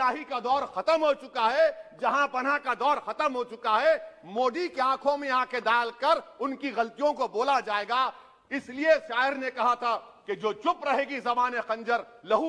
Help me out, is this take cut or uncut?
uncut